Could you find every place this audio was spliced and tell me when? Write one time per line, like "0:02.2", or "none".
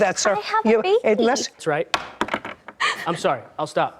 0:01.6